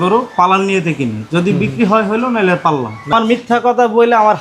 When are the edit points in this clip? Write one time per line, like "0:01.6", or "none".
0:03.1